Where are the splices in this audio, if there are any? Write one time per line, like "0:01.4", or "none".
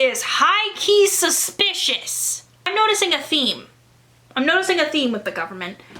0:02.6